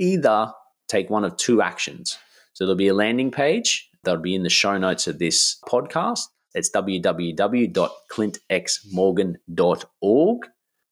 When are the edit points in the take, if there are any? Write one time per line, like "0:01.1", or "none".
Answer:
0:04.0
0:05.7
0:06.4